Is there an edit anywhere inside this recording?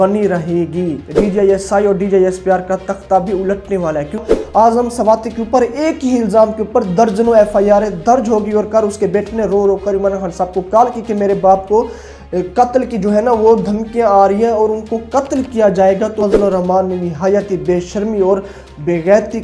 yes; 3 cuts; at 1.0 s, 4.2 s, 16.2 s

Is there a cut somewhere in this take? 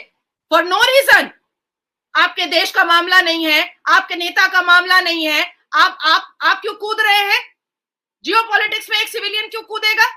no; 0 cuts

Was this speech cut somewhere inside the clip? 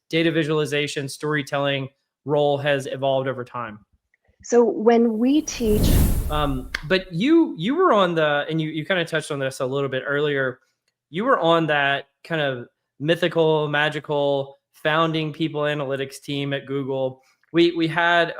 yes; 1 cut; at 5.9 s

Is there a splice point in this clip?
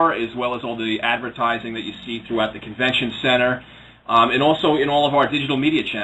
no; 0 cuts

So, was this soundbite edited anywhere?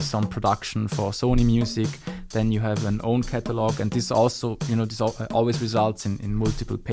no; 0 cuts

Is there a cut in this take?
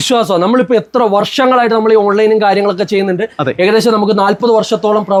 no; 0 cuts

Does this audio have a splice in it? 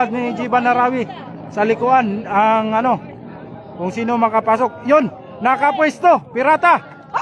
no; 0 cuts

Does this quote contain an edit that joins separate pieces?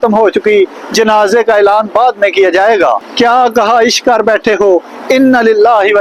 no; 0 cuts

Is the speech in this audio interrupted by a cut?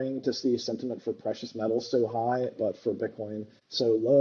no; 0 cuts

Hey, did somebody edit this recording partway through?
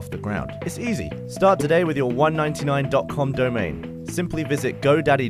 no; 0 cuts

